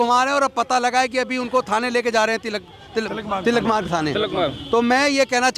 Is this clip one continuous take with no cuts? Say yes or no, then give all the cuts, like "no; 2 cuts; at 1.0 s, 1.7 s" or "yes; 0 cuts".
yes; 0 cuts